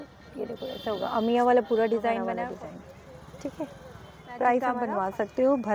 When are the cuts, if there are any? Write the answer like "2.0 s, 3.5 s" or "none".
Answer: 2.3 s, 4.8 s